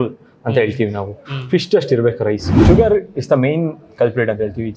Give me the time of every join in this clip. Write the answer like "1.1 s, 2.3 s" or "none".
2.5 s